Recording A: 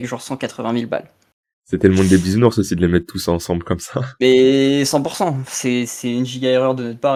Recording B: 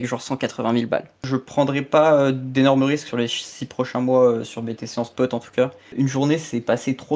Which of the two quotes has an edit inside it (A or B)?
B